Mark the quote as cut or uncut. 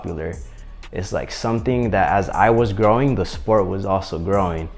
uncut